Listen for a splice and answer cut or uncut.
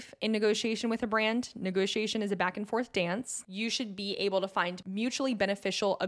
cut